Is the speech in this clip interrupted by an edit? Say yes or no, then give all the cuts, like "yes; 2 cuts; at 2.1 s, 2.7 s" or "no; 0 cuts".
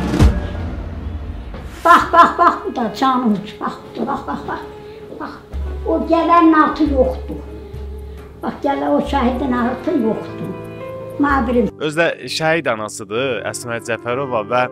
no; 0 cuts